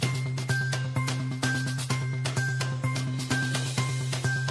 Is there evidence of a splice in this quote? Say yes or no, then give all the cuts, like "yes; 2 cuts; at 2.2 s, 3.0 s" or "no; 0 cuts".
yes; 1 cut; at 2.9 s